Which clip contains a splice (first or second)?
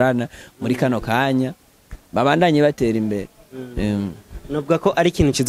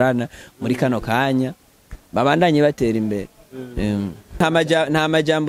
second